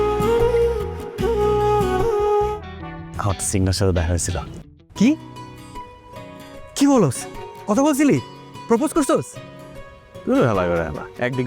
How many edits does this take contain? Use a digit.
1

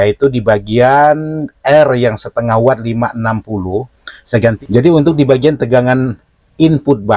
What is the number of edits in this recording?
1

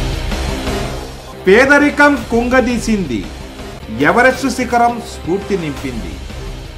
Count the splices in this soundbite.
1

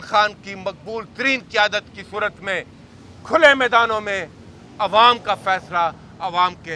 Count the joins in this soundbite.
0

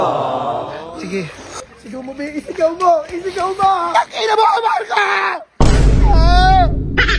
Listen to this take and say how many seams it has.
1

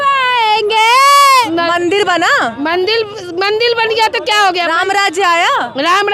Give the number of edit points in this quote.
1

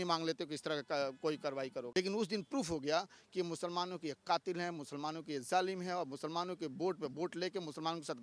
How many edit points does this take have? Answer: 1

